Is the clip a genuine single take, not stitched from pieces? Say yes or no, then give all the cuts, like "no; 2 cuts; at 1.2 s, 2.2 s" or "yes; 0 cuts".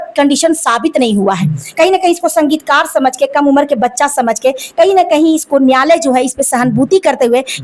yes; 0 cuts